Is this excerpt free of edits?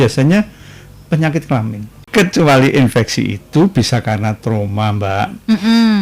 no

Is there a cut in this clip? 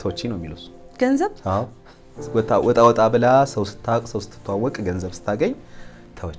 no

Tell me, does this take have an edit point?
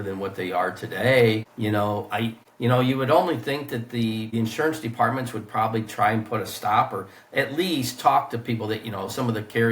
yes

